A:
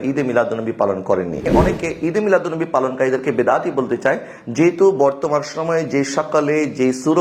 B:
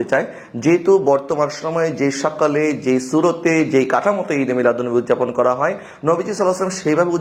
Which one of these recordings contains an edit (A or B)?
A